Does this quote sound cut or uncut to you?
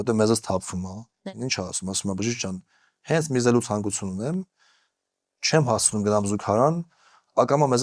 cut